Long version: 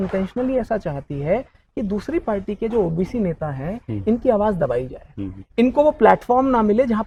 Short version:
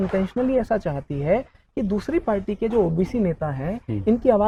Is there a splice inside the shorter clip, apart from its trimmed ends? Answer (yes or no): no